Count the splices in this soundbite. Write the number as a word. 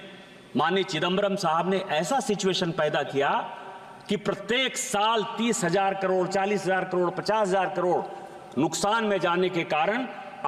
zero